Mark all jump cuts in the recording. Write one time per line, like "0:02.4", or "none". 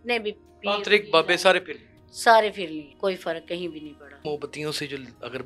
0:02.9
0:04.2

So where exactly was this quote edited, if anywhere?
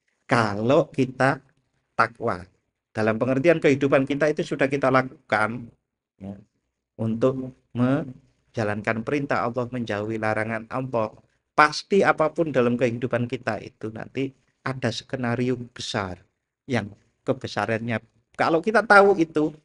none

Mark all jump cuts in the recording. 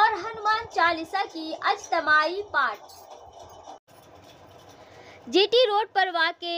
none

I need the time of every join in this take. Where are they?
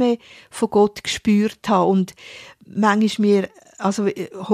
none

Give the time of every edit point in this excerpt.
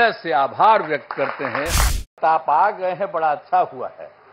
0:02.2

